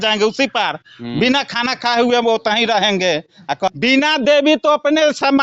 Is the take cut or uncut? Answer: cut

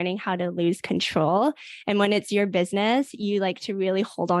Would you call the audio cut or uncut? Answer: uncut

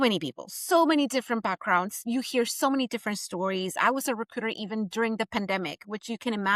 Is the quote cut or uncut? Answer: uncut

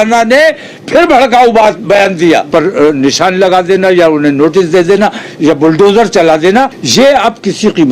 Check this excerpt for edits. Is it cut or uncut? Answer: cut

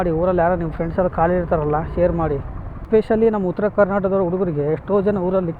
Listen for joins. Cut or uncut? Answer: cut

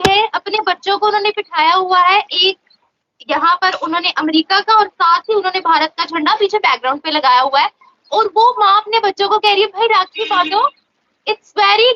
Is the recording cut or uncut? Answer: uncut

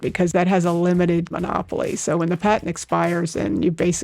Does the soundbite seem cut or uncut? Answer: cut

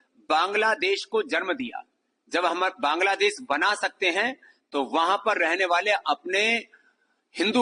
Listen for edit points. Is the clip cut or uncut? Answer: uncut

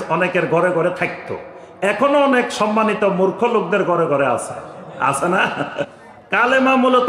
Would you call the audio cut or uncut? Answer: cut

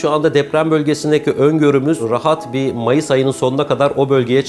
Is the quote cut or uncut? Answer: uncut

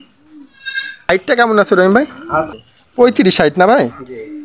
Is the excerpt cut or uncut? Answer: cut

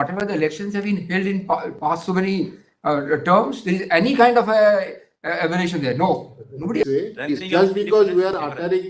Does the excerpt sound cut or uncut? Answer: cut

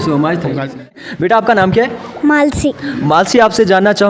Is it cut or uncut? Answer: cut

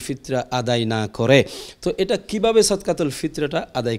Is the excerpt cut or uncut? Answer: uncut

